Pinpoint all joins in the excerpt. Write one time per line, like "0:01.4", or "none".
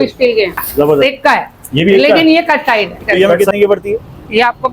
0:01.0
0:03.0